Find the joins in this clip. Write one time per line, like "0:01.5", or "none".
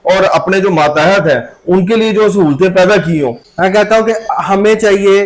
0:03.4